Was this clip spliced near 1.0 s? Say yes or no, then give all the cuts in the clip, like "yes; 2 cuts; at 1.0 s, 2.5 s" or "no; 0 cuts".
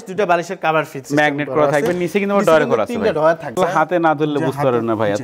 yes; 2 cuts; at 1.0 s, 3.6 s